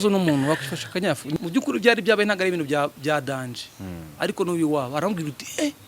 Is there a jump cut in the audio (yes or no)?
yes